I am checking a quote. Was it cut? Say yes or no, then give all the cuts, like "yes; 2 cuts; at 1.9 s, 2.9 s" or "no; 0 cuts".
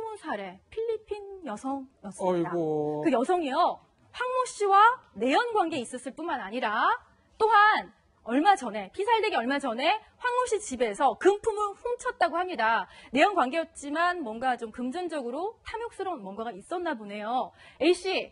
yes; 1 cut; at 17.4 s